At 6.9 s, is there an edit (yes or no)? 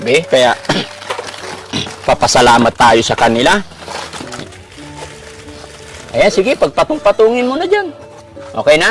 no